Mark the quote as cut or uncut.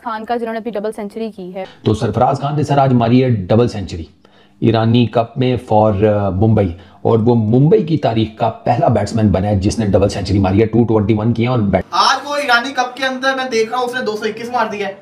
cut